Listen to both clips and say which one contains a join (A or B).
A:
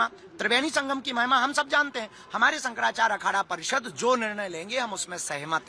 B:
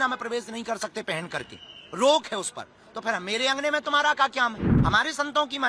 B